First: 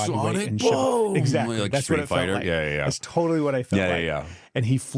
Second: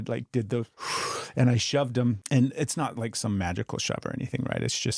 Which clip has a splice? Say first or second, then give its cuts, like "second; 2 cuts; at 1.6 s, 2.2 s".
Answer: second; 1 cut; at 2.2 s